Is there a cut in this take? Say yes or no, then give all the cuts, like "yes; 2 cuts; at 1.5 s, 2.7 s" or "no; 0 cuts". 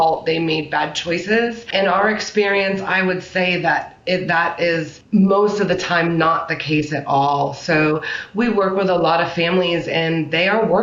yes; 2 cuts; at 1.7 s, 5.0 s